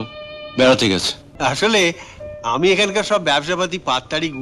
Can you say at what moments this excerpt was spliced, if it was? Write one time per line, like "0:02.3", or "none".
0:01.2